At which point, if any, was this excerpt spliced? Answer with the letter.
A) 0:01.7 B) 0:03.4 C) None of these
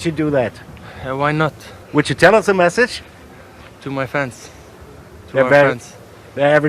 A